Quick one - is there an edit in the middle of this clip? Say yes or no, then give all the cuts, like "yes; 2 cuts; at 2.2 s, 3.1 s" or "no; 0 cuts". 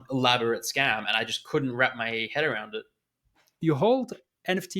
yes; 1 cut; at 3.6 s